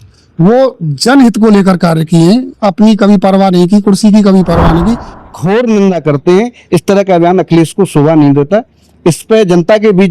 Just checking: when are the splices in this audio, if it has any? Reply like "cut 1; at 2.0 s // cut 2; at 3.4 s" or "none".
cut 1; at 5.1 s